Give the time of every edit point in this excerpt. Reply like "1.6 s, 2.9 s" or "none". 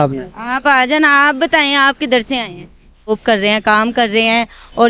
3.1 s

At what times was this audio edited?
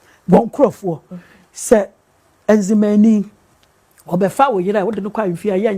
none

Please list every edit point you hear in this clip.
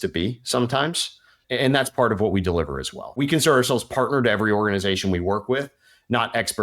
1.4 s, 3.2 s

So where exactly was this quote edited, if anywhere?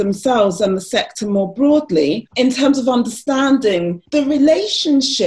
2.2 s

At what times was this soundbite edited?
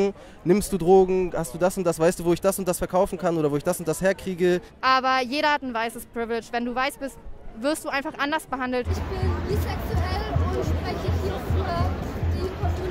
4.7 s, 8.9 s

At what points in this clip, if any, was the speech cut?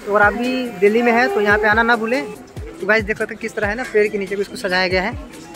2.3 s

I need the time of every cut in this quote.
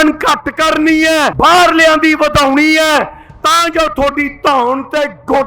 1.3 s

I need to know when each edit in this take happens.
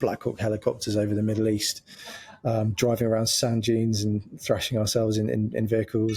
none

